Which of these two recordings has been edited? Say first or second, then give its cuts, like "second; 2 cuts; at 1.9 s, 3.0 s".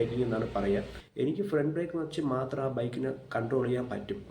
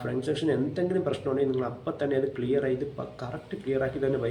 first; 1 cut; at 0.9 s